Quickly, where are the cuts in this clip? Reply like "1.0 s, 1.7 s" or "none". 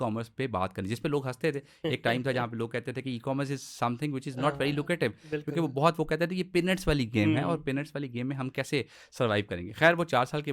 none